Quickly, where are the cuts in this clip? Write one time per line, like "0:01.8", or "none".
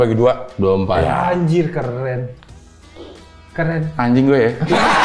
none